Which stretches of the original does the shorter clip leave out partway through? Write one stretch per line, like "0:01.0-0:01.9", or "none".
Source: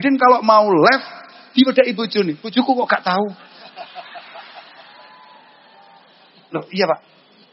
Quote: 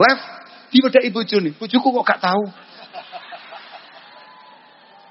none